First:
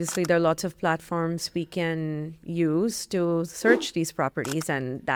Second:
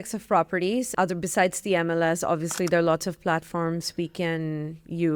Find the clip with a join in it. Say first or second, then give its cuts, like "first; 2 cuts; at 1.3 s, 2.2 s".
second; 1 cut; at 0.9 s